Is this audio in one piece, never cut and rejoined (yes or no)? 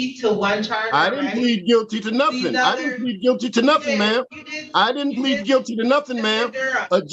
yes